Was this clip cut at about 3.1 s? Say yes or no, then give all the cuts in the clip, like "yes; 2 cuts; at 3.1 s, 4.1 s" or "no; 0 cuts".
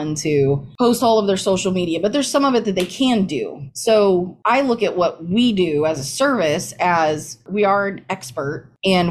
no; 0 cuts